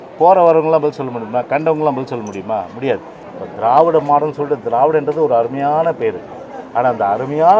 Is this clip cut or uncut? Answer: cut